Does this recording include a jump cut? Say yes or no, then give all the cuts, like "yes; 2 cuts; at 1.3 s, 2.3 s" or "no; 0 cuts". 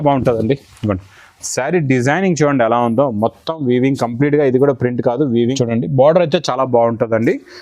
yes; 1 cut; at 5.5 s